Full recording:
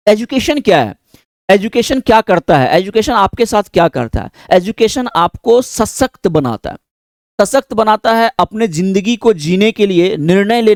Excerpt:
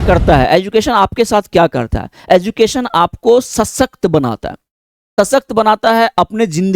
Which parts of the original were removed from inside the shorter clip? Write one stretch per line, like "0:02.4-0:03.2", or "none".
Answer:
none